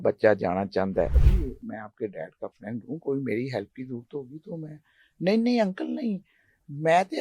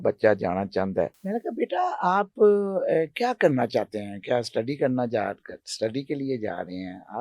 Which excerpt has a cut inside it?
first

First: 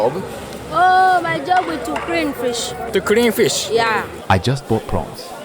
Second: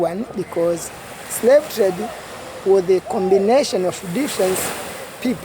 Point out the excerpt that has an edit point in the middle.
first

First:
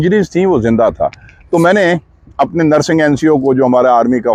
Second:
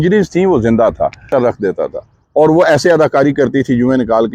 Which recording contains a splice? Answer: second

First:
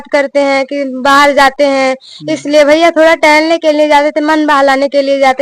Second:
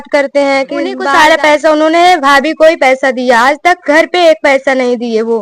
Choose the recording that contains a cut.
second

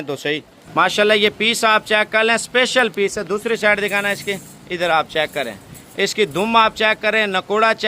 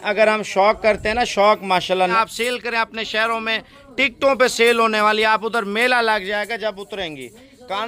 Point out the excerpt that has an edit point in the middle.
second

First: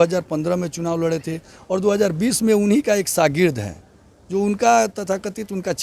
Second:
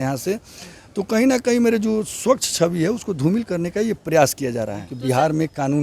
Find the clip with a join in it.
second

